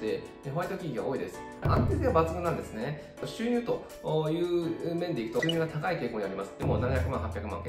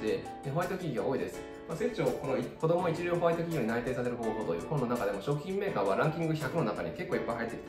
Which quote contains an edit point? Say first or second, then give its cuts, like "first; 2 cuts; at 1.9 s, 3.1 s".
first; 2 cuts; at 1.6 s, 5.4 s